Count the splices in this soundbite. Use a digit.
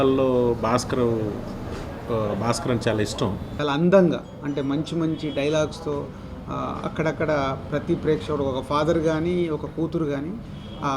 1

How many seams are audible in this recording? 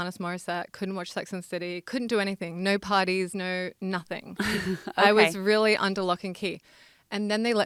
0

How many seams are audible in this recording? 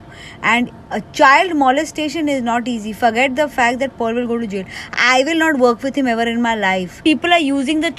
1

